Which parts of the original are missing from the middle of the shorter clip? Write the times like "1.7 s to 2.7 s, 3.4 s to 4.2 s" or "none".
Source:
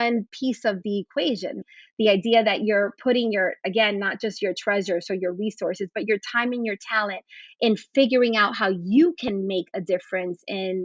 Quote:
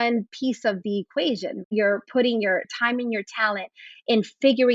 1.7 s to 2.6 s, 3.6 s to 6.3 s